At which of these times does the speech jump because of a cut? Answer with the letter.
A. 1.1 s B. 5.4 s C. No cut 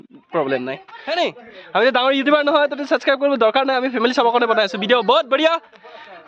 A